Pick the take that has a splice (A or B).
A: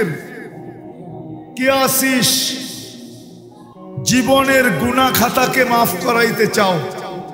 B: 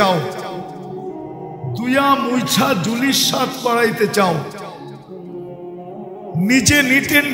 B